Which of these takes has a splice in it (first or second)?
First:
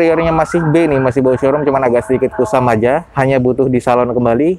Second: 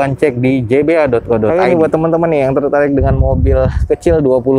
second